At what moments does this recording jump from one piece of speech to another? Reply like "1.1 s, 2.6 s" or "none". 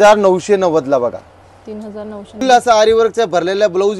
2.4 s